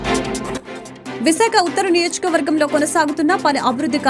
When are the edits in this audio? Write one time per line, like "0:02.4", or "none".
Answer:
0:01.0